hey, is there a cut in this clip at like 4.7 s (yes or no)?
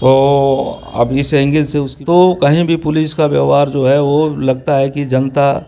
no